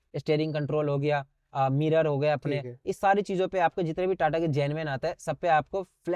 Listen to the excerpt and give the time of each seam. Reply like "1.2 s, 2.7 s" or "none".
none